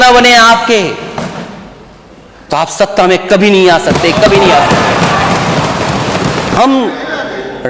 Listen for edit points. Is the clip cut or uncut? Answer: cut